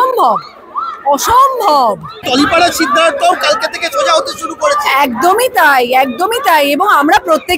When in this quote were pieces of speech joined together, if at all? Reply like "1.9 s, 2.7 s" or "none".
2.2 s